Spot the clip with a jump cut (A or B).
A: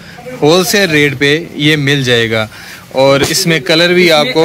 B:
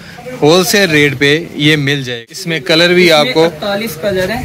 B